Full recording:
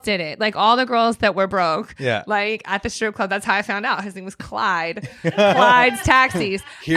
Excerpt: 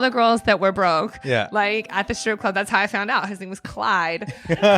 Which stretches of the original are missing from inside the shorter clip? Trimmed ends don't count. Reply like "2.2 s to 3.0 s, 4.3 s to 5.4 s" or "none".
none